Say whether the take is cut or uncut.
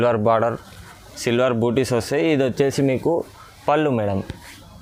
uncut